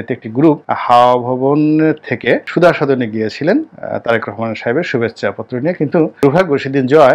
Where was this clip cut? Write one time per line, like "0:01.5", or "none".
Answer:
none